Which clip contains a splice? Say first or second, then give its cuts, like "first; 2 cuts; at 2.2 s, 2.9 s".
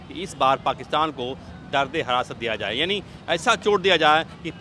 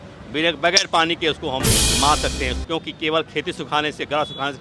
second; 1 cut; at 2.6 s